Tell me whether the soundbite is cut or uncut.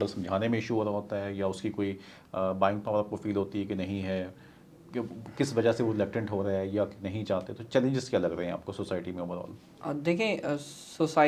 uncut